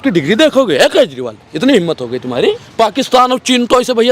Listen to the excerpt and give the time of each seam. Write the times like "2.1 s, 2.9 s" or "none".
2.6 s